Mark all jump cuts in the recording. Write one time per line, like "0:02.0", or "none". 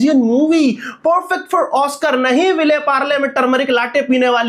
none